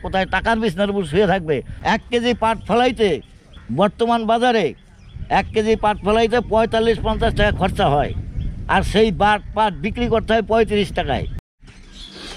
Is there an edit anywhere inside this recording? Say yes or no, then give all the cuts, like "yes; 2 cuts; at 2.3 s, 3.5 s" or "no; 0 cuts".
yes; 2 cuts; at 1.7 s, 11.3 s